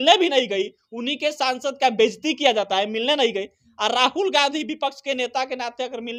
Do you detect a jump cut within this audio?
no; 0 cuts

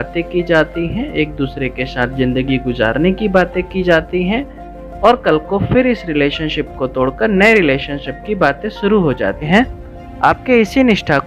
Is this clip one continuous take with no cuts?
no; 1 cut; at 9.5 s

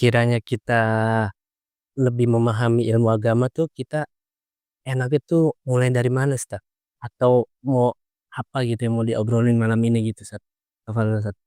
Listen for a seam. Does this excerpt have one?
no; 0 cuts

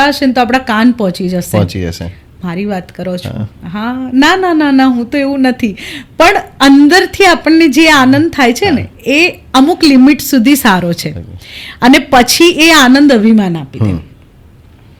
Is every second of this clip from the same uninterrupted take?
yes; 0 cuts

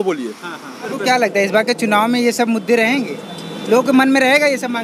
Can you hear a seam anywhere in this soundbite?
yes; 1 cut; at 0.9 s

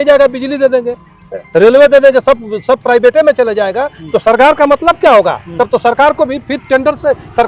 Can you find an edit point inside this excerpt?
no; 0 cuts

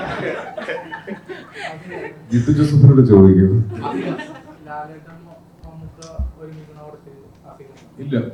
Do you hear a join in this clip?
yes; 1 cut; at 4.5 s

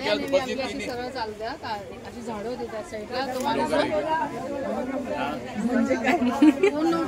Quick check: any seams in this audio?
no; 0 cuts

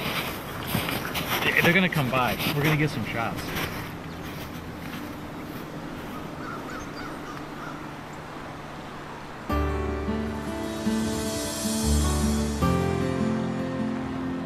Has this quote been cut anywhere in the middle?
yes; 1 cut; at 1.0 s

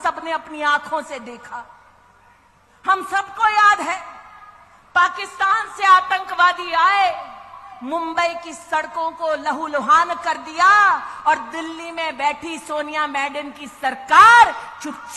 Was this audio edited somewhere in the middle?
no; 0 cuts

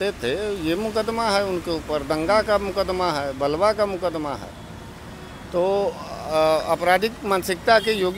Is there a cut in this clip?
no; 0 cuts

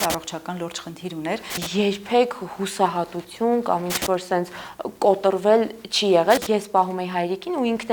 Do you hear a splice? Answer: yes; 2 cuts; at 1.6 s, 6.4 s

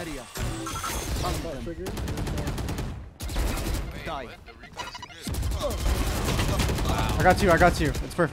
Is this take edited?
no; 0 cuts

